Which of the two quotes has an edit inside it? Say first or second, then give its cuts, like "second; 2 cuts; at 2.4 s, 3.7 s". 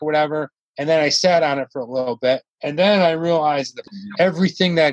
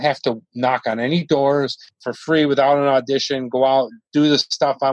first; 2 cuts; at 2.6 s, 3.9 s